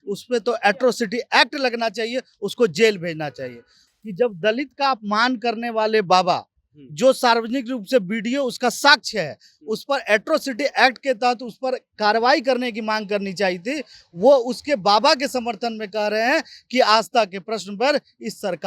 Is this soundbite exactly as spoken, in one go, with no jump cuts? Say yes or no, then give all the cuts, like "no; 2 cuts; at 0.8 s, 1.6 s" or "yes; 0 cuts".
no; 1 cut; at 3.8 s